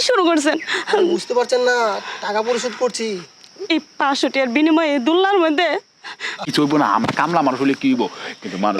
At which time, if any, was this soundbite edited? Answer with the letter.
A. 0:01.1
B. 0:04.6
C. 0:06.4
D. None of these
C